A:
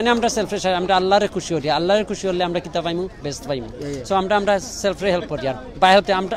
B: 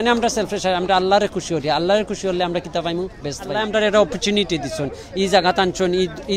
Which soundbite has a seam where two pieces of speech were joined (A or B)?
B